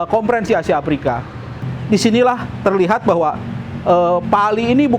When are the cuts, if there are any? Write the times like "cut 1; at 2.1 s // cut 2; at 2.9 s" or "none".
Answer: cut 1; at 1.6 s